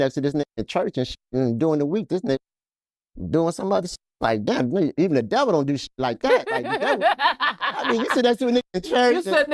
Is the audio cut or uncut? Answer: uncut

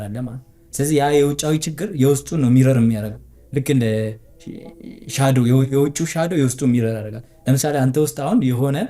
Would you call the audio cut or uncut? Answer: uncut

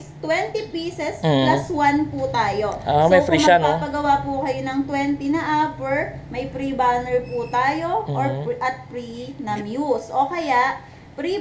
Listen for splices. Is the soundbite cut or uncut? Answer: uncut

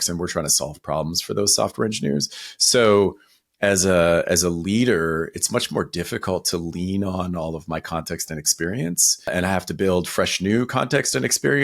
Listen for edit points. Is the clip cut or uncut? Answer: cut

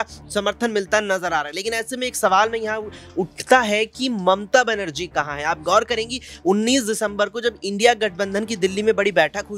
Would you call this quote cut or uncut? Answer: uncut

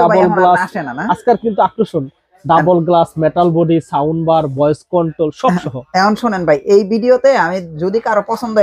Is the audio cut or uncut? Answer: uncut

